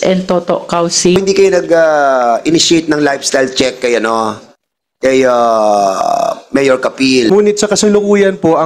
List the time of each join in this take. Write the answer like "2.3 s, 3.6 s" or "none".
1.1 s, 7.3 s